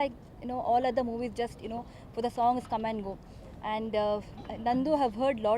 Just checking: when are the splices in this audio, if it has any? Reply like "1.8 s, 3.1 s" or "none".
none